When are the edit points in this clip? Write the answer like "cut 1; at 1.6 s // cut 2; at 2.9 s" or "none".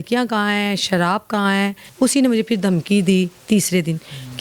cut 1; at 1.8 s